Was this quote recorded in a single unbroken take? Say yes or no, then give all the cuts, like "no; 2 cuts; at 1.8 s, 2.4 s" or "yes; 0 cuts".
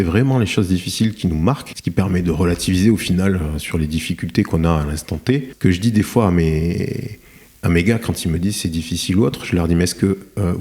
no; 2 cuts; at 1.7 s, 5.5 s